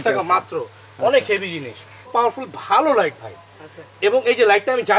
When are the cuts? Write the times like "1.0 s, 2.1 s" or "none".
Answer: 2.1 s